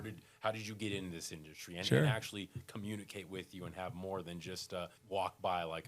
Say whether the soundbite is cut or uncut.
cut